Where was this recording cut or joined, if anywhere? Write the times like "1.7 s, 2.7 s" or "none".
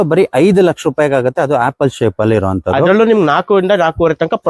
none